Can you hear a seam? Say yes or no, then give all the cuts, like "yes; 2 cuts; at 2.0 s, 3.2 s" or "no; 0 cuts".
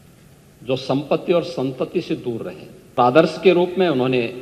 yes; 1 cut; at 3.0 s